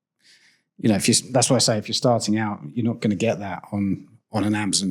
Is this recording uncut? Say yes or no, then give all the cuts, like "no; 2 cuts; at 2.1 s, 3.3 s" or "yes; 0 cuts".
yes; 0 cuts